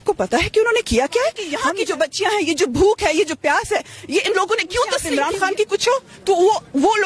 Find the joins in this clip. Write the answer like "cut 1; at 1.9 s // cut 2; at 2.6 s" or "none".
cut 1; at 1.5 s // cut 2; at 5.0 s